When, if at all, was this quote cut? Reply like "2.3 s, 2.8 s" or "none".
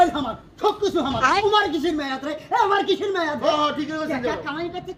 none